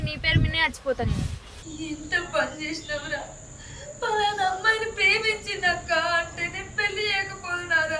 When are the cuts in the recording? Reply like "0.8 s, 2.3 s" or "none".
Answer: 1.7 s